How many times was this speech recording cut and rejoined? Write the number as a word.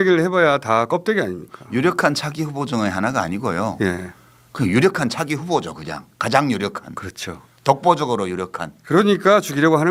zero